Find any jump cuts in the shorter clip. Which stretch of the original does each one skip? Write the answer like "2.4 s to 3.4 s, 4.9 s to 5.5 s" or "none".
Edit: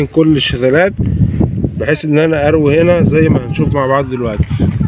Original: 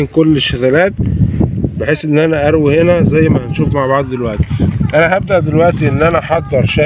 none